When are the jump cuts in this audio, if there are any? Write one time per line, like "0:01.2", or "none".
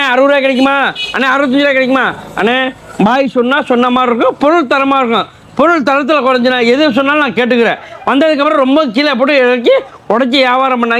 none

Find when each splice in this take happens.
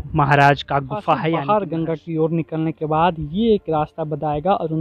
0:01.4

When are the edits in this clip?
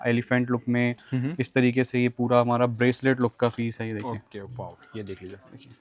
none

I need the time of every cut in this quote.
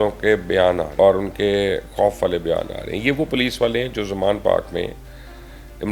0:00.9

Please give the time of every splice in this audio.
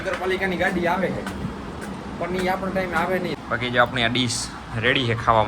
0:03.3

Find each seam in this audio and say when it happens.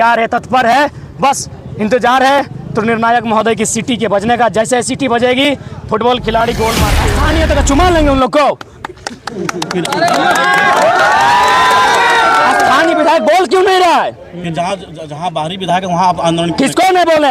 0:07.0

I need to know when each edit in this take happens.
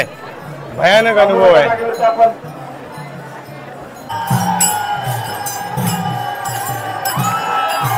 0:04.1

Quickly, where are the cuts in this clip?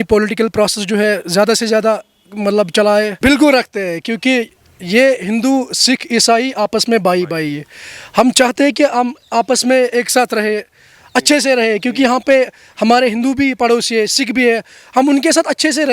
0:03.1

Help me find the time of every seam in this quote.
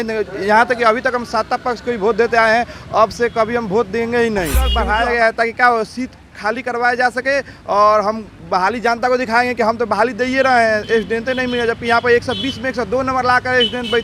0:04.7

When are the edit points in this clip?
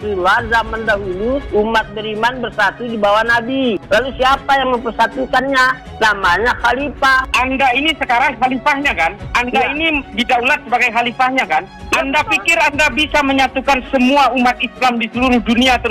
none

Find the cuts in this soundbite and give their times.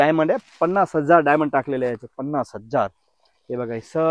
none

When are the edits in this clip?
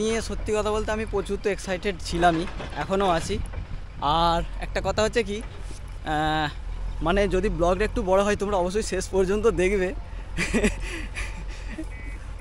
none

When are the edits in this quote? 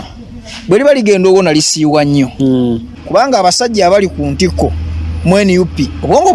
0:02.9

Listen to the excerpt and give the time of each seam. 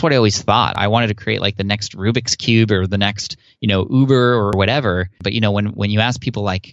0:05.2

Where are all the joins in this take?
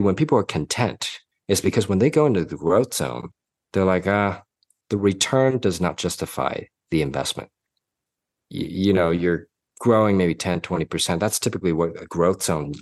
none

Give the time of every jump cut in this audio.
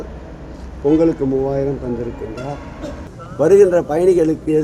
0:03.1

